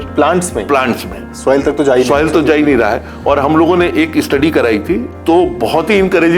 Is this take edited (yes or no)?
yes